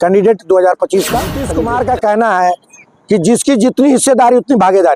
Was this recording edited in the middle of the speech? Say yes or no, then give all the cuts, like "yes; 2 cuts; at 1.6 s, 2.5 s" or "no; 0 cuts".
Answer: yes; 1 cut; at 1.4 s